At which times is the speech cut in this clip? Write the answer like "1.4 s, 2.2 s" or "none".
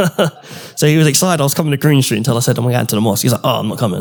none